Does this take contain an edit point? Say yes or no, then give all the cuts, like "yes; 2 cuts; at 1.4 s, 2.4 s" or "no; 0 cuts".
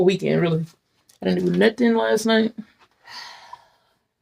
yes; 1 cut; at 2.9 s